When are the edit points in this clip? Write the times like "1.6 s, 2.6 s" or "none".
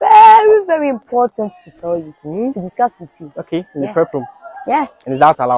none